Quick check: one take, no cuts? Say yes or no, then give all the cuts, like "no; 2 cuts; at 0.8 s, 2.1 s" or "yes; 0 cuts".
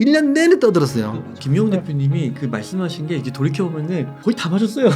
no; 2 cuts; at 1.3 s, 4.1 s